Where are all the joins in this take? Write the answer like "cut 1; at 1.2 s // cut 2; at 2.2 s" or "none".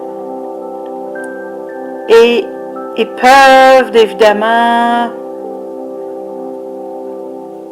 cut 1; at 1.6 s